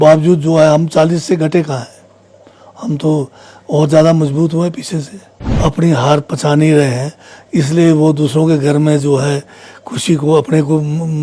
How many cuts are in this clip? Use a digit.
1